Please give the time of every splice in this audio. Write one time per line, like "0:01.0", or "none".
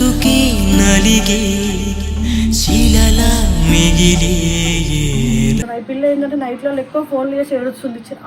0:05.7